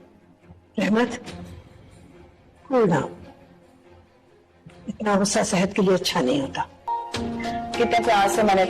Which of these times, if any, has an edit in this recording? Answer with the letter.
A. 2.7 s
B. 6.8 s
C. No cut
B